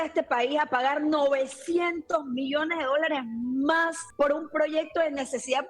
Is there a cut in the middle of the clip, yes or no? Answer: yes